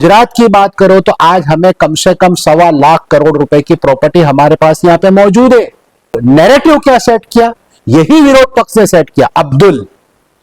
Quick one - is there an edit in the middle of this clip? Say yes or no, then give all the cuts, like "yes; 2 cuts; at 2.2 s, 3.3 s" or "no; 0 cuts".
yes; 1 cut; at 6.2 s